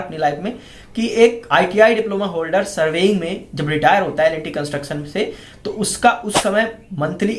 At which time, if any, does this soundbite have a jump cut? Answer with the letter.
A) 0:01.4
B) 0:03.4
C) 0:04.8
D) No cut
A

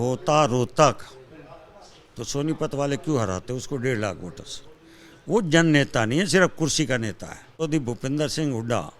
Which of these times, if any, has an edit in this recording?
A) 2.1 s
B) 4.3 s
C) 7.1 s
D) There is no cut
C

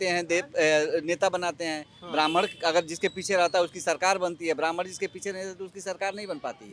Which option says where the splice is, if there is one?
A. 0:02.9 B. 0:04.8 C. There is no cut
C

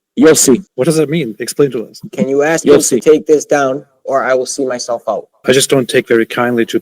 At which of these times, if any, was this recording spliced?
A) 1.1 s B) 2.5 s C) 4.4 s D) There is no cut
B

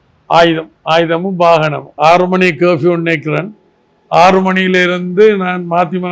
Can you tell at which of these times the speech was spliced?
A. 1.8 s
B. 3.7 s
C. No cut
A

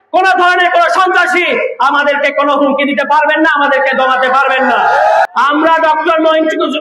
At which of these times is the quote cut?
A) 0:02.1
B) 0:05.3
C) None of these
B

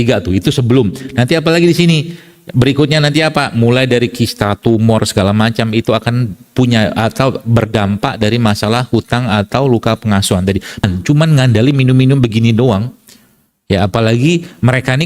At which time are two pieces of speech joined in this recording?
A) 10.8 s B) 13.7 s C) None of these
A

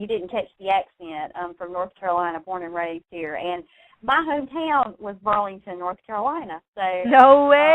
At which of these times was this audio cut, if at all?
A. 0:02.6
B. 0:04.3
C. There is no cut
A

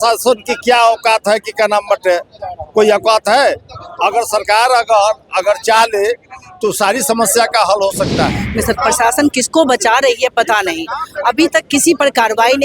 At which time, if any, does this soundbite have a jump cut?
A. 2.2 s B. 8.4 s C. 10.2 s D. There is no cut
B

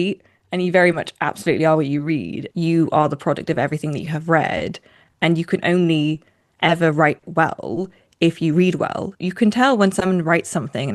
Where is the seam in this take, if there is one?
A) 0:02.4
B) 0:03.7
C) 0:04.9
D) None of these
A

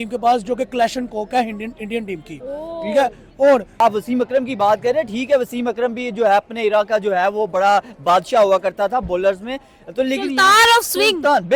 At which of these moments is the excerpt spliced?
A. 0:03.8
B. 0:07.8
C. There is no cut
A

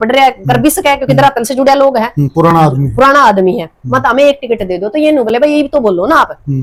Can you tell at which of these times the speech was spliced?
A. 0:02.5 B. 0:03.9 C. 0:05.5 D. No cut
D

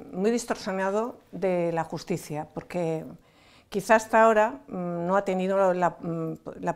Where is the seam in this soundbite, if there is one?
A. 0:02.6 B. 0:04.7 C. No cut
C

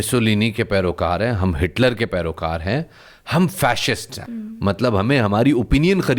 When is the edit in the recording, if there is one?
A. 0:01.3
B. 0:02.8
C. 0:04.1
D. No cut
C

